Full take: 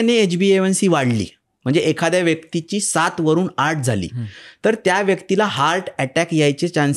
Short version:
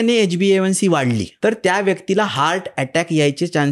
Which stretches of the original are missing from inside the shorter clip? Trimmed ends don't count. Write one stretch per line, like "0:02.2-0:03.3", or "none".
0:01.3-0:04.5